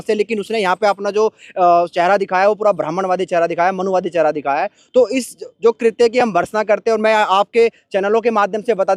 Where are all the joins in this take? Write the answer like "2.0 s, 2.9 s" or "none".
none